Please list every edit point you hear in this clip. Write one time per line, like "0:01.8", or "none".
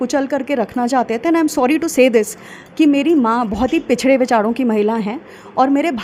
none